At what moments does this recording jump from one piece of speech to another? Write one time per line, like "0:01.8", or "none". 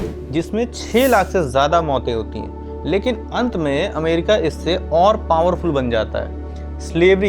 none